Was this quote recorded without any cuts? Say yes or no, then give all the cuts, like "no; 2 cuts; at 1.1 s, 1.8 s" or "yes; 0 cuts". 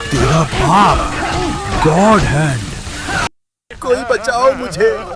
no; 1 cut; at 3.3 s